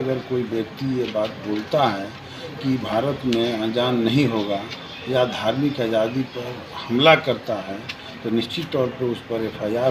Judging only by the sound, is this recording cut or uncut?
uncut